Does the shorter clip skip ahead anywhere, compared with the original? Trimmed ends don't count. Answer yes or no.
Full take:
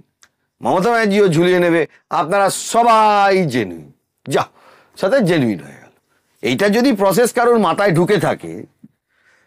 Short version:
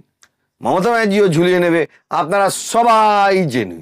no